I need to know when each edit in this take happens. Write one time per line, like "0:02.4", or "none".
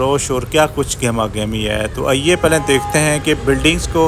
none